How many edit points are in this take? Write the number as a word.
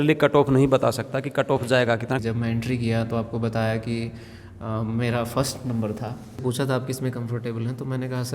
two